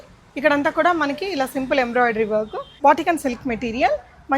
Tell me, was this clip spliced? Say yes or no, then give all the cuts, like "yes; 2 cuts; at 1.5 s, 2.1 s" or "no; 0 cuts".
yes; 1 cut; at 2.6 s